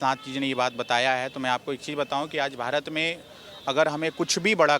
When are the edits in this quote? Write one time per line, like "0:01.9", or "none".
none